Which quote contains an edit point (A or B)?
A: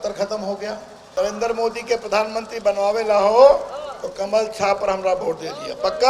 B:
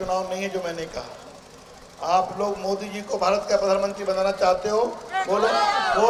A